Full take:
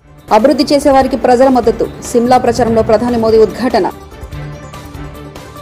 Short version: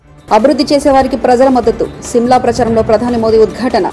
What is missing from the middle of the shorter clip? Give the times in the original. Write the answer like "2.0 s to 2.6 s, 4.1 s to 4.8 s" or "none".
none

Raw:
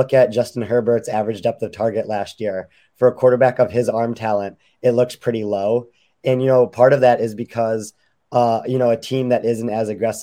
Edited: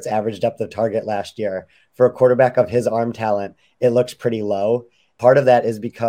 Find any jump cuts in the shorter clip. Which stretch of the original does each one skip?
6.2 s to 6.7 s

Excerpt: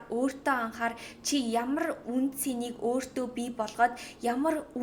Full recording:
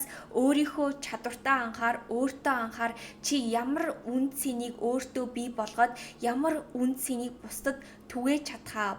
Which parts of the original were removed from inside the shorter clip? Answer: none

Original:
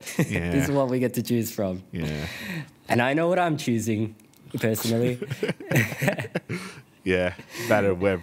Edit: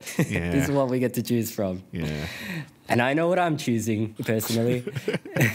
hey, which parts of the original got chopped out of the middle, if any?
4.1 s to 4.5 s

